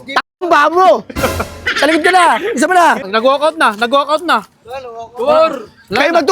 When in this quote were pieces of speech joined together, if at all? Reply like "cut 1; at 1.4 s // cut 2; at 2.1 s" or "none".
cut 1; at 3.0 s

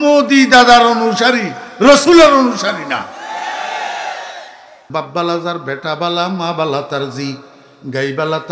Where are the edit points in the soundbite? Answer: cut 1; at 4.8 s

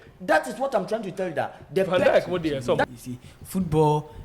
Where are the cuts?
cut 1; at 2.9 s

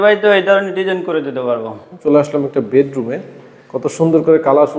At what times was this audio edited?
cut 1; at 1.9 s

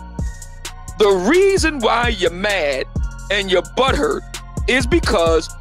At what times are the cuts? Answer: cut 1; at 0.9 s

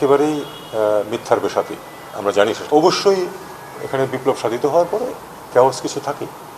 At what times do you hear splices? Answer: cut 1; at 2.6 s

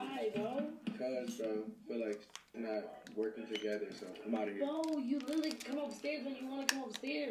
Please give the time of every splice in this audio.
cut 1; at 4.1 s

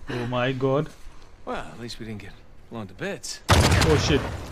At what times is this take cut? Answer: none

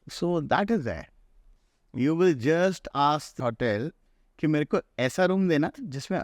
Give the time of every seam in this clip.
cut 1; at 1.2 s

